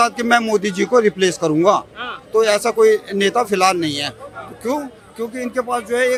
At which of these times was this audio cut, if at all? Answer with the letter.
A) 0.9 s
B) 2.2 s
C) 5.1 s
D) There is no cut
D